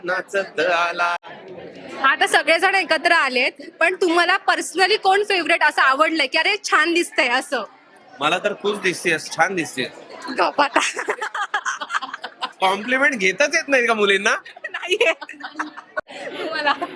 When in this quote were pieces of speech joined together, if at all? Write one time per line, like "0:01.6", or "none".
none